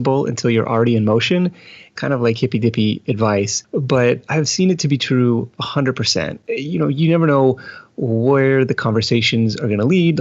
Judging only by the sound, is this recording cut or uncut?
cut